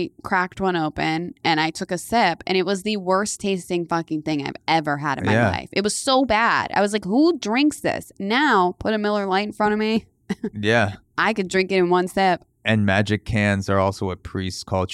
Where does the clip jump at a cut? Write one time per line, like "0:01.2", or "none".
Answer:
none